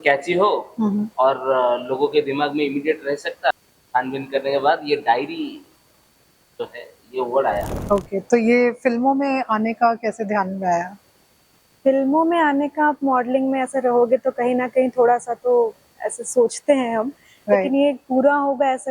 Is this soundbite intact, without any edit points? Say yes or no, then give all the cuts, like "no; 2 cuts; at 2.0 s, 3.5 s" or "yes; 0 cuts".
no; 2 cuts; at 3.5 s, 7.7 s